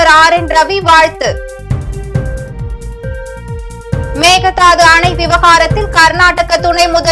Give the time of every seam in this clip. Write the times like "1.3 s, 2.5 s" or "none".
1.4 s, 4.2 s